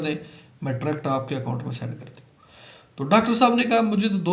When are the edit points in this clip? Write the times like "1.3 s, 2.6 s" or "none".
none